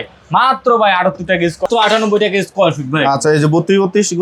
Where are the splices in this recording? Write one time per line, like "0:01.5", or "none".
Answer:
0:01.6